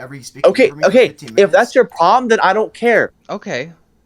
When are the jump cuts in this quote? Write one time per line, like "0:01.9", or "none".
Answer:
0:03.1